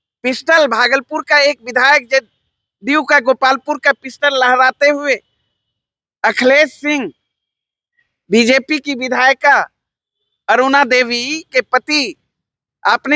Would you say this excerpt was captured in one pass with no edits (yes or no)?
yes